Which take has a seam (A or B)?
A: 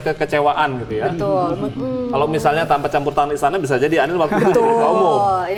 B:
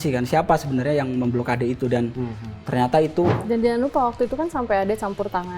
B